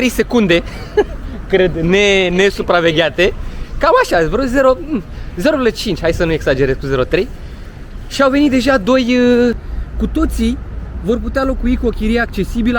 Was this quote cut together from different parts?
yes; 1 cut; at 9.6 s

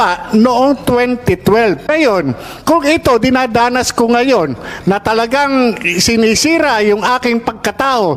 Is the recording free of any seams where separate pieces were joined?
no; 1 cut; at 1.8 s

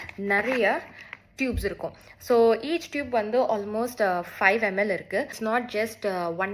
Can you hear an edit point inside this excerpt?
yes; 1 cut; at 5.4 s

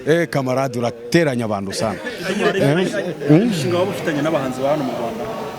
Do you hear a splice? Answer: no; 0 cuts

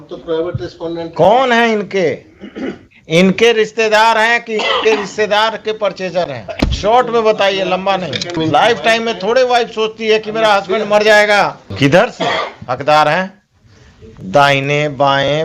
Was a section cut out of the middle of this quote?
yes; 3 cuts; at 6.5 s, 8.4 s, 11.7 s

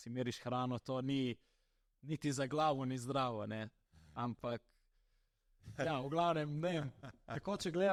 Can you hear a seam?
no; 0 cuts

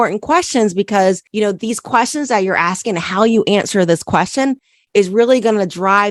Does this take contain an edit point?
no; 0 cuts

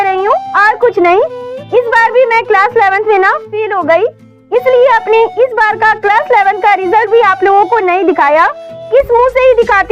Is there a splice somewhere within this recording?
no; 0 cuts

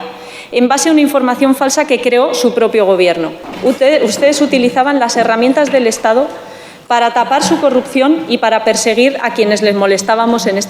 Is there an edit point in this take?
yes; 1 cut; at 3.5 s

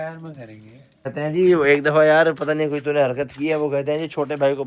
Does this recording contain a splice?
yes; 1 cut; at 1.1 s

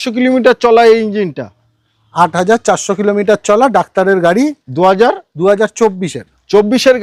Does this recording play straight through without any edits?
yes; 0 cuts

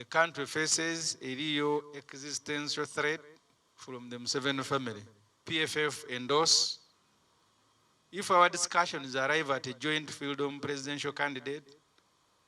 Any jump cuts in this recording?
yes; 1 cut; at 5.4 s

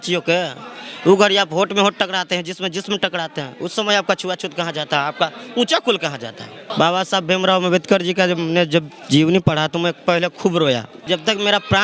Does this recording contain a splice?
yes; 2 cuts; at 6.7 s, 11.1 s

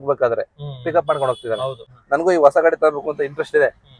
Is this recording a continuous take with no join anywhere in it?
no; 1 cut; at 1.9 s

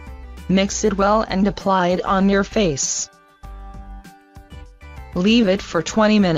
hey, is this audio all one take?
yes; 0 cuts

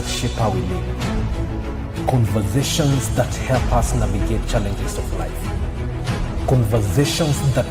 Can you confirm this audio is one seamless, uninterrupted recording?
yes; 0 cuts

